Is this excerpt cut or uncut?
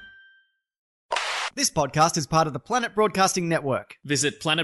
cut